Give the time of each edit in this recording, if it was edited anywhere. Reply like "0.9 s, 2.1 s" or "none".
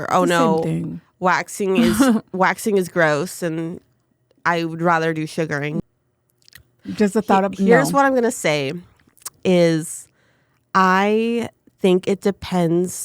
5.8 s